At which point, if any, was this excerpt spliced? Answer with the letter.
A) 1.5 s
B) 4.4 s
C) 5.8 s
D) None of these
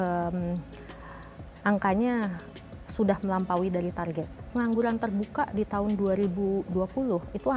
B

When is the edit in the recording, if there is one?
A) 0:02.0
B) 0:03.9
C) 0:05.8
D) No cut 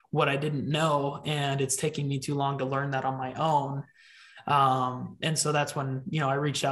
D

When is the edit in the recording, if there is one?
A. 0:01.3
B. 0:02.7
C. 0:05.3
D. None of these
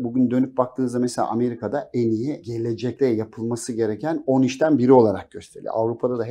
B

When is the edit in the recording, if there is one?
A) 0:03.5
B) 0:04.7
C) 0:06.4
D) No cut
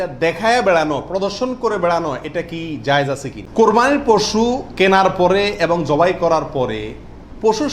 A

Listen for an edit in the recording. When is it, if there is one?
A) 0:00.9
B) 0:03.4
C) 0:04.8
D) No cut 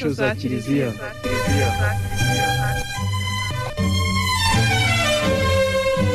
A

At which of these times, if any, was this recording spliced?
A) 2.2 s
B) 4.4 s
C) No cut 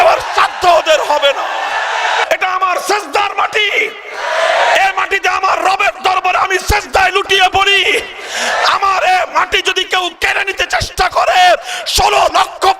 A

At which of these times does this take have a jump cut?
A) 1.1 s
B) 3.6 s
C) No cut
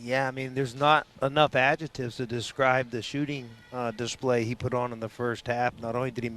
A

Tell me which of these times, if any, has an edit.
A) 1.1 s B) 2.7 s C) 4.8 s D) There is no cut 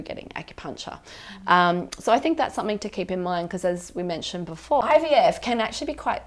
C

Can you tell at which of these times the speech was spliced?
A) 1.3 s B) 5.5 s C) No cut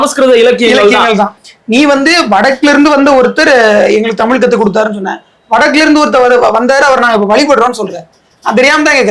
A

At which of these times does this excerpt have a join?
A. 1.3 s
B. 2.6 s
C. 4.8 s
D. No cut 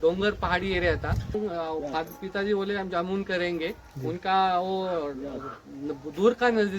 A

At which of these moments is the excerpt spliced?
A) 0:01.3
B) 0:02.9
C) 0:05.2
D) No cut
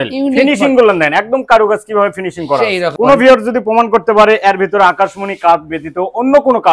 B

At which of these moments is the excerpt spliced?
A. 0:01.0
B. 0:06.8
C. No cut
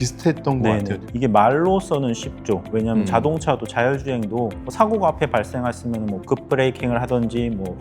A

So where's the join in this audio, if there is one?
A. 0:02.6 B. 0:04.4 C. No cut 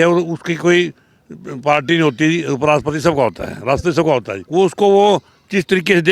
B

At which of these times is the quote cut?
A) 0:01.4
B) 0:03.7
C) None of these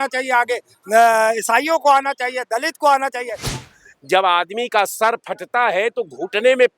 B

